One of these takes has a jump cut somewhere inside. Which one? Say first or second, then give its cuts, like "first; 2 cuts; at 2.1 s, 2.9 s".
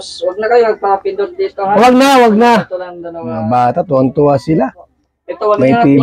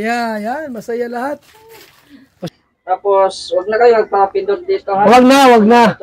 second; 1 cut; at 2.4 s